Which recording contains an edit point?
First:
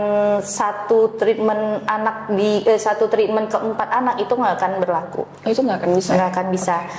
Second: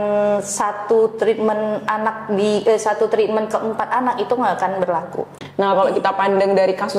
second; 1 cut; at 5.2 s

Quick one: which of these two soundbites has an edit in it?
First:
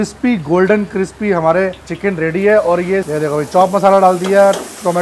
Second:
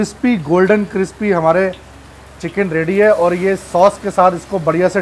first; 2 cuts; at 1.9 s, 3.1 s

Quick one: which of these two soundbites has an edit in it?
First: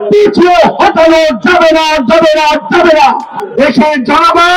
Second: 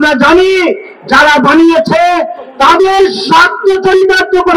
first; 1 cut; at 3.4 s

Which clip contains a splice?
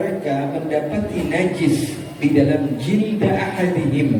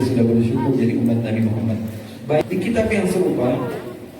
second; 1 cut; at 2.4 s

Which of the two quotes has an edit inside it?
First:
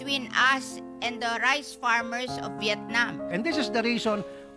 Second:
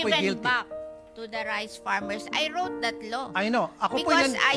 first; 1 cut; at 3.3 s

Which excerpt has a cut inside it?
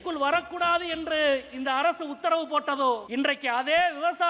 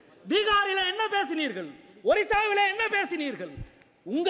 first; 1 cut; at 3.0 s

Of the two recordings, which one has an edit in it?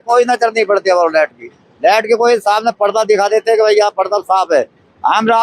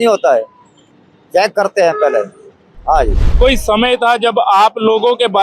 second; 1 cut; at 3.2 s

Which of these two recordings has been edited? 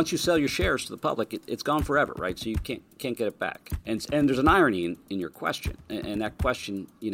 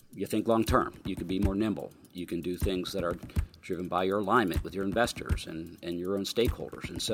first; 1 cut; at 3.7 s

